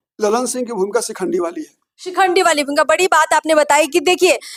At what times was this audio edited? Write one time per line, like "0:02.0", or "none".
none